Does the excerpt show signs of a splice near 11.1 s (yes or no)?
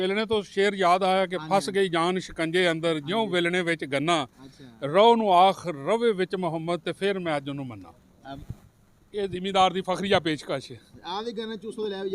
no